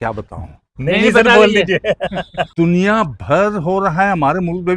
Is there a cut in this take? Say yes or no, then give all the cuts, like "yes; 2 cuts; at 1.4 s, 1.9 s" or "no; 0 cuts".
yes; 1 cut; at 2.4 s